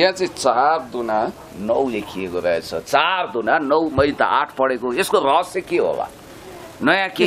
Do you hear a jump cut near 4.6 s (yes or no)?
no